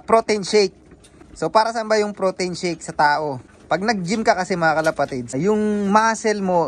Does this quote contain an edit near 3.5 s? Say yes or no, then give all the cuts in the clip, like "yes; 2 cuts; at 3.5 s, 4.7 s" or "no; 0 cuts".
yes; 2 cuts; at 3.5 s, 5.4 s